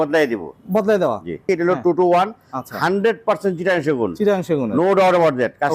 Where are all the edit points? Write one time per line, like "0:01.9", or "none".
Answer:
0:01.4